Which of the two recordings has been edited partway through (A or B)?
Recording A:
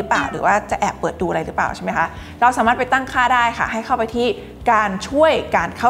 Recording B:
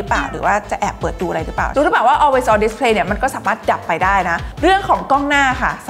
B